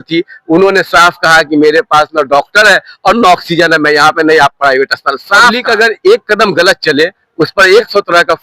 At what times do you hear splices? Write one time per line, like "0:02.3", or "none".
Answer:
0:05.5